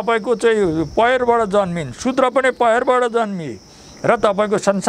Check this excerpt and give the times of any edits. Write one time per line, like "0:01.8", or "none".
none